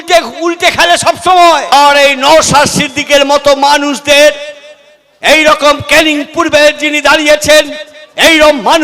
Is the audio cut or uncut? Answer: cut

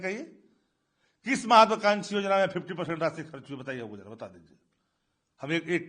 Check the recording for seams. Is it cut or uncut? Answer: uncut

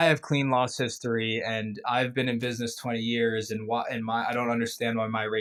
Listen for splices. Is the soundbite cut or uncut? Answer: uncut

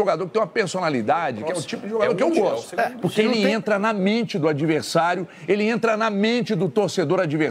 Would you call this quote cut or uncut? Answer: uncut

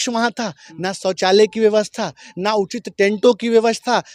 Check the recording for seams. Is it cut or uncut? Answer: uncut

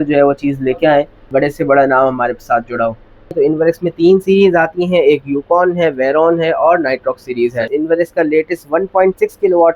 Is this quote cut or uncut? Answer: cut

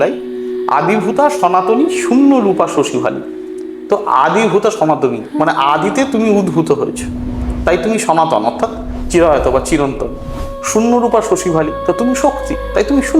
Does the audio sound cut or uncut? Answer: uncut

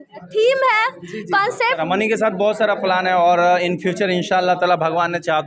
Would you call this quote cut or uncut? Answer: cut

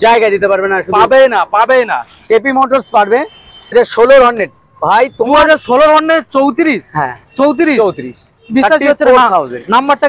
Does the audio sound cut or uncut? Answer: cut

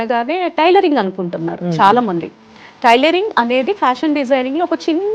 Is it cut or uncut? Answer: uncut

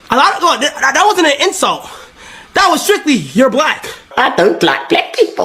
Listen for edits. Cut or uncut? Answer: cut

